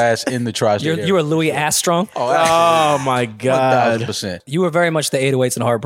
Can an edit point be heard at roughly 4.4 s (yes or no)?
yes